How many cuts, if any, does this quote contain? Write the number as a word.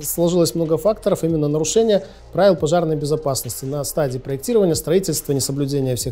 zero